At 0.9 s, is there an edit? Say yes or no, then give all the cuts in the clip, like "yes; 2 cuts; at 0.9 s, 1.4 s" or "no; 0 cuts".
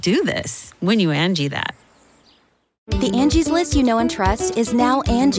no; 1 cut; at 2.6 s